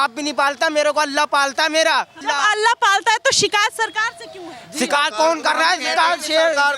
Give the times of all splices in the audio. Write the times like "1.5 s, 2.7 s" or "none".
2.2 s